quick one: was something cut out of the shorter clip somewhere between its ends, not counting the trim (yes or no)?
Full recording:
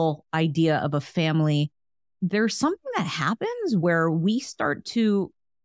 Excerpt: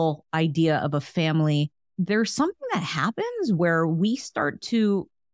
yes